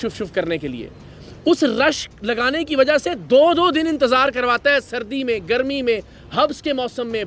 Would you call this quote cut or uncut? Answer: uncut